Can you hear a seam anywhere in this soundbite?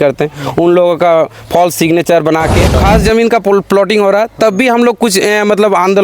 yes; 1 cut; at 2.8 s

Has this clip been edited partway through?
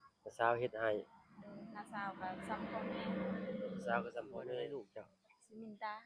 yes; 1 cut; at 4.9 s

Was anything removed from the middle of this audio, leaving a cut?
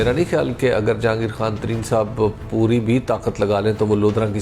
no; 0 cuts

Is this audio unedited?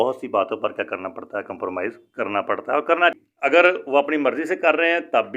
no; 1 cut; at 3.2 s

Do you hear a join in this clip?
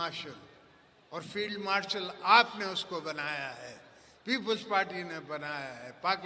no; 0 cuts

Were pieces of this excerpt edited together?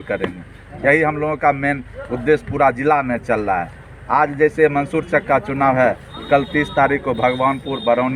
no; 0 cuts

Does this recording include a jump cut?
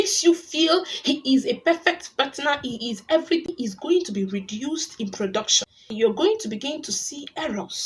yes; 1 cut; at 5.9 s

